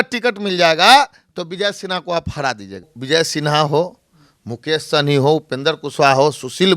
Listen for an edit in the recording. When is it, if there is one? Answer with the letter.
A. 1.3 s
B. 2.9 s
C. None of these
B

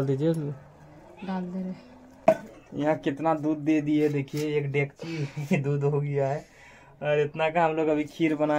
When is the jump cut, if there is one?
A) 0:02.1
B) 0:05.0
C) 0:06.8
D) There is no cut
A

